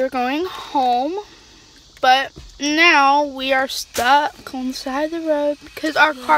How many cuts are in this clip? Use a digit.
0